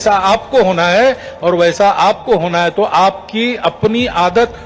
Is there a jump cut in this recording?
no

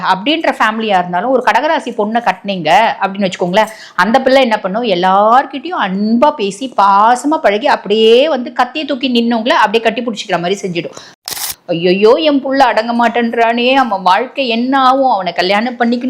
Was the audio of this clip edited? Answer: yes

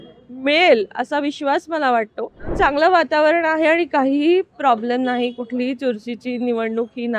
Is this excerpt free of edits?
no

